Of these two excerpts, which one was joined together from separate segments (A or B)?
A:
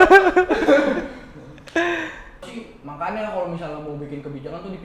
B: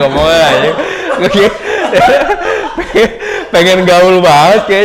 A